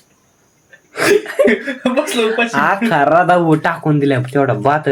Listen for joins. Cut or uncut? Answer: uncut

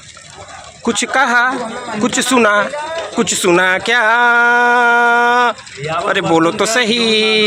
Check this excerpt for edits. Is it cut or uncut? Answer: uncut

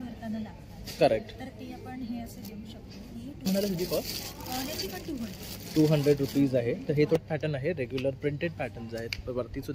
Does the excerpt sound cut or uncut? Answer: cut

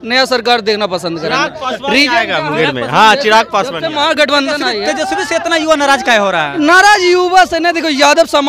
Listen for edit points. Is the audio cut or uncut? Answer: uncut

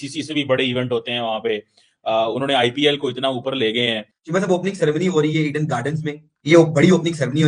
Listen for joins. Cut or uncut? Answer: cut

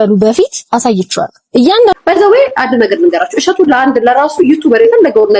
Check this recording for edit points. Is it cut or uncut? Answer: cut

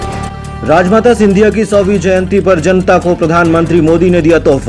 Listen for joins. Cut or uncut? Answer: uncut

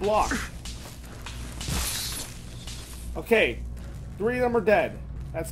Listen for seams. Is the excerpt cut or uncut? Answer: uncut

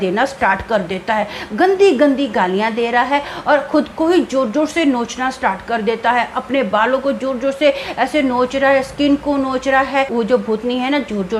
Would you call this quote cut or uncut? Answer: cut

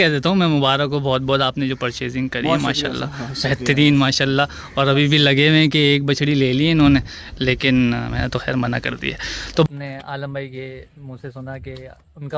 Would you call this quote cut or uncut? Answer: cut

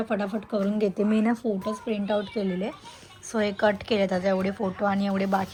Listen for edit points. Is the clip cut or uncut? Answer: uncut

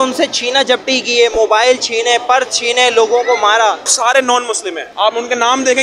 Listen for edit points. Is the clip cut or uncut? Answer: cut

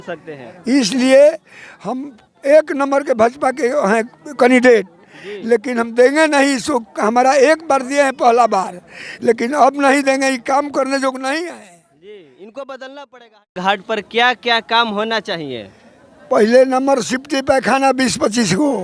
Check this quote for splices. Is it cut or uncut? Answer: cut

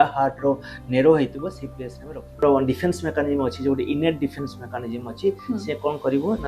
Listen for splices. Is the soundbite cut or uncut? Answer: cut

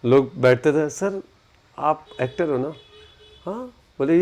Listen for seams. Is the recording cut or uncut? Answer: uncut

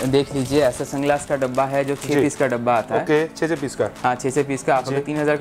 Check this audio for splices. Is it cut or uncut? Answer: uncut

